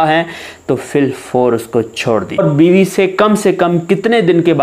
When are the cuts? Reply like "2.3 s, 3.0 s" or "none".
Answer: 2.4 s